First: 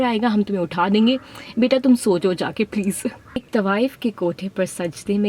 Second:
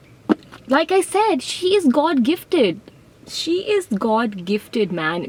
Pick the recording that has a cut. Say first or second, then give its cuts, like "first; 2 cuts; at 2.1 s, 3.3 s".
first; 1 cut; at 3.4 s